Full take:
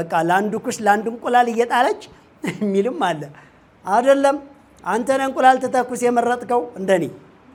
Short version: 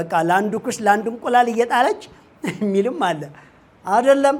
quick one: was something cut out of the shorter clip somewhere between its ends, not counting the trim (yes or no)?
no